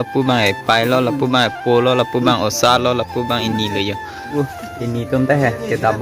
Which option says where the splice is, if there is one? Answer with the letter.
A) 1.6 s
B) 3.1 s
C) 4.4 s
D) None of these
C